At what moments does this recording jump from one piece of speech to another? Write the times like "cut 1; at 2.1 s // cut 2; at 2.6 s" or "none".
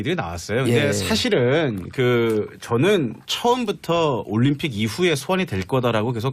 cut 1; at 4.3 s